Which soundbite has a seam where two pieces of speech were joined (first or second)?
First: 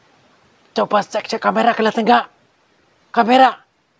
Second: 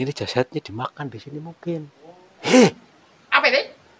second